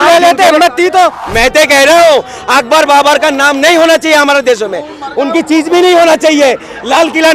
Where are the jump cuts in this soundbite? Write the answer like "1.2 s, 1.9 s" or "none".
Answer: 1.2 s